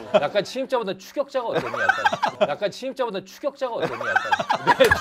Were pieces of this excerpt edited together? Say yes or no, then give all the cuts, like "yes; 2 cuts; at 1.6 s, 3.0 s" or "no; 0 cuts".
no; 0 cuts